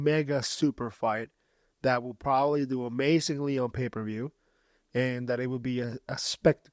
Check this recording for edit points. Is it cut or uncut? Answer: uncut